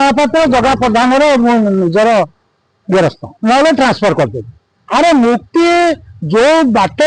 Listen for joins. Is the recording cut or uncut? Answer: cut